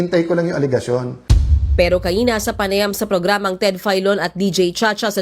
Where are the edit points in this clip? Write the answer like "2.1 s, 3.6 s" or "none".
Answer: 1.1 s

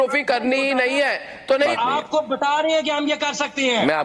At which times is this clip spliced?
1.7 s

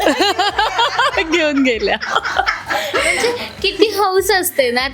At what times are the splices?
none

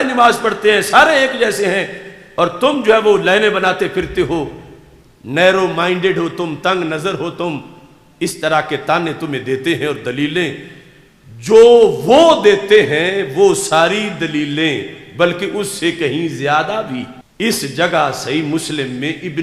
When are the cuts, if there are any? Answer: 17.2 s

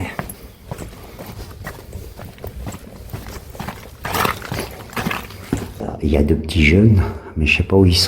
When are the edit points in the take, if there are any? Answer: 5.8 s

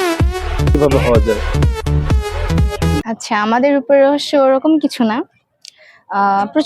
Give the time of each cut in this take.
3.0 s

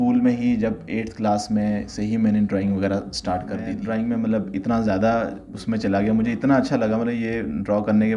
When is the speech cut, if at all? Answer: 3.8 s

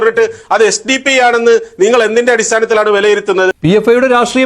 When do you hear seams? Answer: 3.5 s

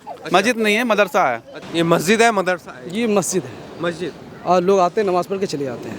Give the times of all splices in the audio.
1.6 s

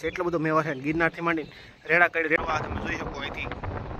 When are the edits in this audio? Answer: 2.4 s

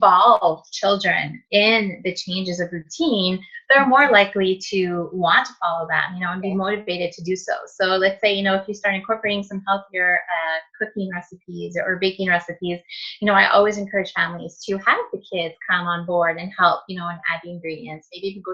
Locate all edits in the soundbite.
none

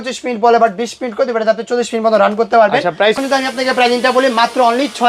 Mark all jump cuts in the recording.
3.2 s

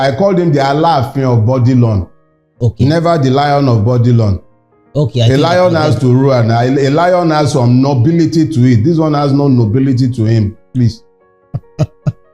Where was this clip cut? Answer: none

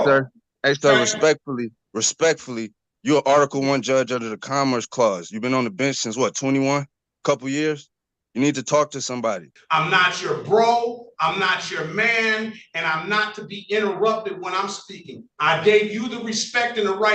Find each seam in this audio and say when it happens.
9.5 s

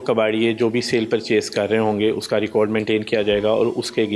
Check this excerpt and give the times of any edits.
none

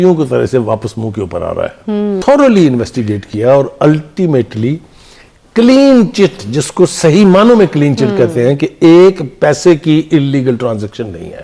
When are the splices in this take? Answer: 2.2 s

